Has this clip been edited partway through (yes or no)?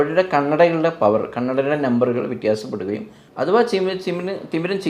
yes